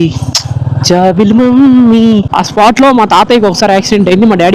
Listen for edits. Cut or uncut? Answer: cut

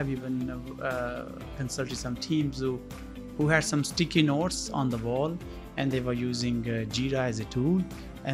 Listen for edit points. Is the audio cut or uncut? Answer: uncut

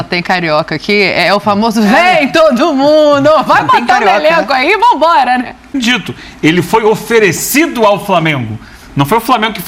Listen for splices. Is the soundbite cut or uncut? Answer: cut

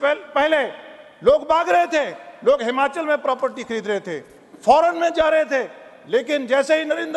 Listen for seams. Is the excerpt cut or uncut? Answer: uncut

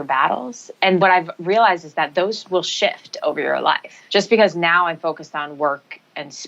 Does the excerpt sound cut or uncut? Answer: cut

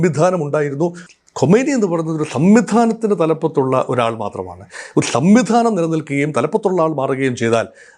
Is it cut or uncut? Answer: cut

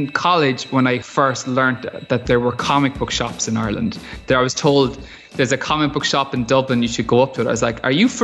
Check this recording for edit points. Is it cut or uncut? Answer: cut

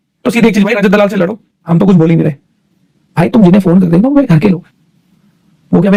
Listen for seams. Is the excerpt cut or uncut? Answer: uncut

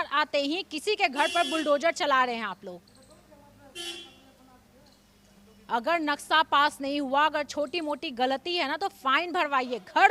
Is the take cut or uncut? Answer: uncut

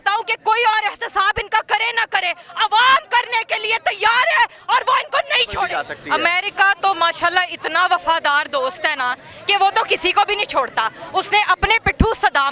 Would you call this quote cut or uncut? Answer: cut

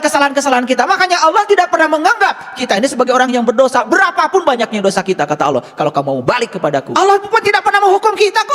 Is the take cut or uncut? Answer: cut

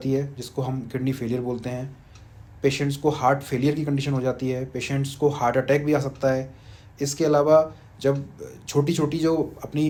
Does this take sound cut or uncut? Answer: uncut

